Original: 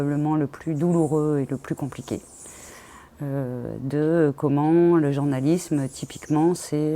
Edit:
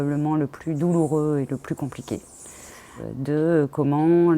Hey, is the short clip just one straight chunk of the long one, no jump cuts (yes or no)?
no